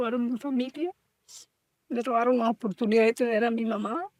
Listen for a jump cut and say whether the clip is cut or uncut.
uncut